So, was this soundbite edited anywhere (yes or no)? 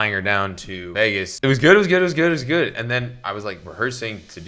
yes